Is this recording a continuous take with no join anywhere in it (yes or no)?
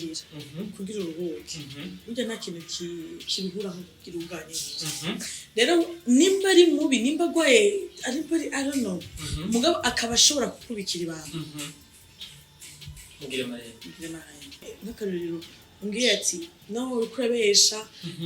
no